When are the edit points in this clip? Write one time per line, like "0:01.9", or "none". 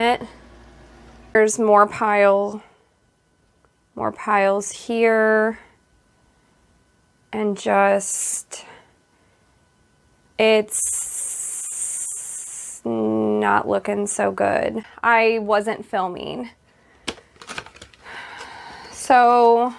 0:01.3
0:14.9